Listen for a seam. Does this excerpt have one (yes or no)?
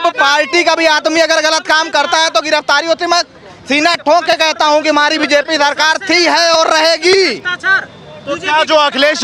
no